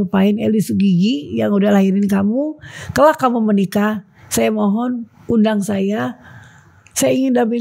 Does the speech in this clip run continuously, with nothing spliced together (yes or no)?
yes